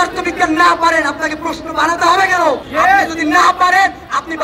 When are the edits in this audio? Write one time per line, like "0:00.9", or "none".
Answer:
0:02.6

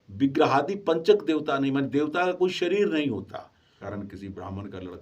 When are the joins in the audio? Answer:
0:03.8

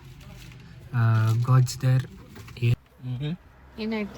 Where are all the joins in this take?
0:02.7

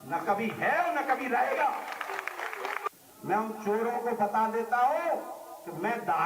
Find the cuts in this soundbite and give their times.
0:02.8

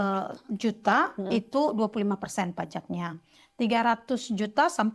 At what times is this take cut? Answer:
none

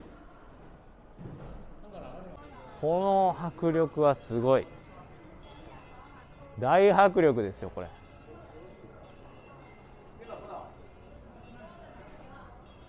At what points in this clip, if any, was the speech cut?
0:02.4

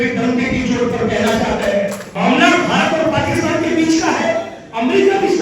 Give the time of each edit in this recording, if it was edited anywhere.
0:02.0

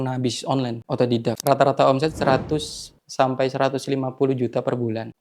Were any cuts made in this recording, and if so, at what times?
0:01.4

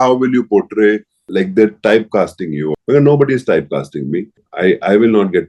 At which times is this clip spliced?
0:01.2
0:02.7
0:04.4

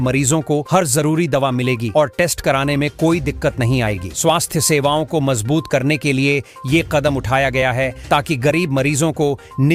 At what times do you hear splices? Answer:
none

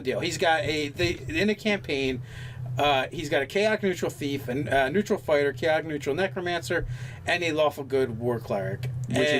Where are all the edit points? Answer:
0:01.5

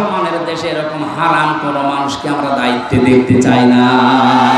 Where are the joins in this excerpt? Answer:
none

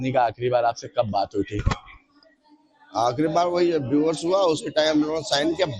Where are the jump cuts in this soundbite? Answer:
none

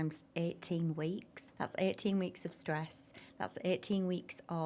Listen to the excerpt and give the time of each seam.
0:01.4

